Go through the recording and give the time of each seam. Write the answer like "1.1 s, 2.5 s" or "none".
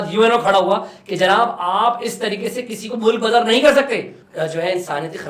4.2 s